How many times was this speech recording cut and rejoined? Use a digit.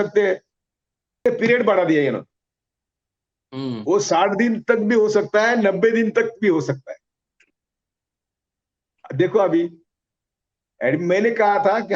1